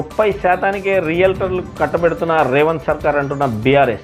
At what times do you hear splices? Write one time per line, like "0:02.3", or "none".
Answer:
none